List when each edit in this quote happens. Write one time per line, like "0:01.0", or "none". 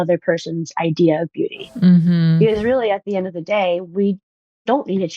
none